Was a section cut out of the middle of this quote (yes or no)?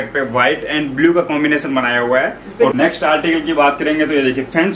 yes